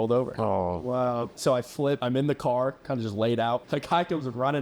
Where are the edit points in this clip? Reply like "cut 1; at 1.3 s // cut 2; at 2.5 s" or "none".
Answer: cut 1; at 1.6 s // cut 2; at 3.7 s